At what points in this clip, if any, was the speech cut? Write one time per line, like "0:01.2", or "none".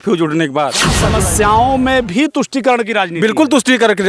0:01.0